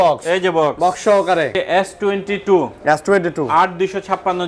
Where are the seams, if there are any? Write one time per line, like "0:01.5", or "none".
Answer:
0:01.6